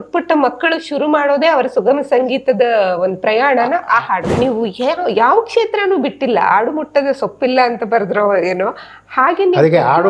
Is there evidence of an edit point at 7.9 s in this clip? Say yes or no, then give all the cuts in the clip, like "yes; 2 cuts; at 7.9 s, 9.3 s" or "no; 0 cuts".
no; 1 cut; at 4.3 s